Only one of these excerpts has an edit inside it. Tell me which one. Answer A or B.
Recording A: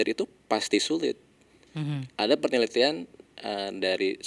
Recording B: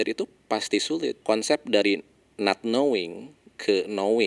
B